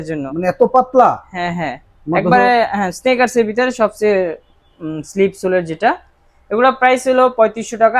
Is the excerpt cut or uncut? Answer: uncut